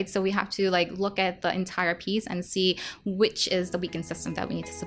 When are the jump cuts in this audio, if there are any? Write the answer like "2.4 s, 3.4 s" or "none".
none